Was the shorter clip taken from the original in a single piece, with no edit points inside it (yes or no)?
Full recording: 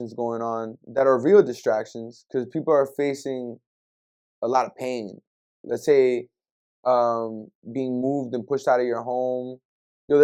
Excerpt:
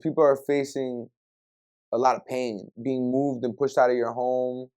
no